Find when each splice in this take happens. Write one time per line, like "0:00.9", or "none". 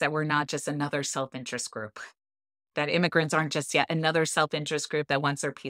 0:02.7